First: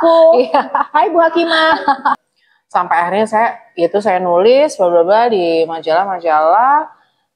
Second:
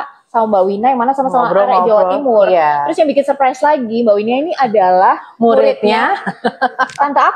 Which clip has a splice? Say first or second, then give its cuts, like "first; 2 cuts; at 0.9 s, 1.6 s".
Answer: first; 1 cut; at 2.3 s